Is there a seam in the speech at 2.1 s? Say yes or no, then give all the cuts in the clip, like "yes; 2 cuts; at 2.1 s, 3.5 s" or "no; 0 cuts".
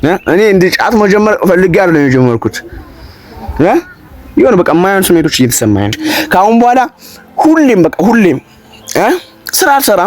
no; 1 cut; at 6.0 s